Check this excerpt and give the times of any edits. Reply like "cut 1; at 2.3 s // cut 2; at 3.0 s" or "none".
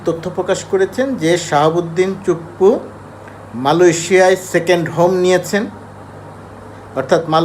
none

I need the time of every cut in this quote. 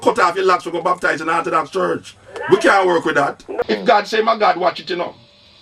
cut 1; at 3.5 s

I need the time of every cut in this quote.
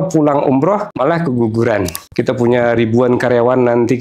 cut 1; at 0.9 s // cut 2; at 2.0 s

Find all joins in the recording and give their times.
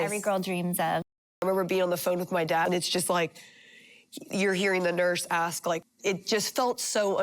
cut 1; at 1.2 s // cut 2; at 2.7 s // cut 3; at 5.8 s

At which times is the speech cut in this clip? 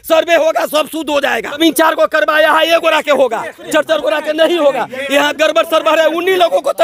cut 1; at 1.6 s

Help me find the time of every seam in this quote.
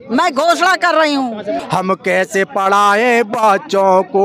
cut 1; at 1.6 s

